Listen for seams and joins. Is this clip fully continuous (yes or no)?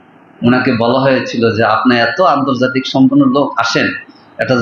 yes